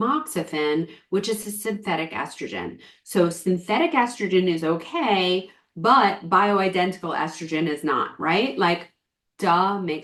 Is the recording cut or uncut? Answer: uncut